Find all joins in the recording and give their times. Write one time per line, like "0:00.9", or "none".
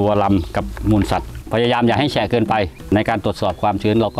0:01.3
0:02.9